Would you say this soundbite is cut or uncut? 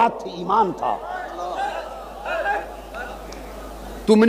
uncut